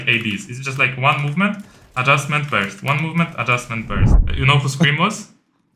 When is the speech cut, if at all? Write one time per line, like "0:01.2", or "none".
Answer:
0:04.2

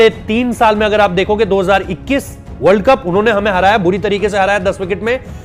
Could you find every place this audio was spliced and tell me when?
none

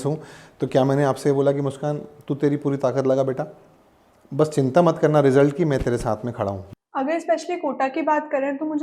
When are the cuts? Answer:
0:06.6

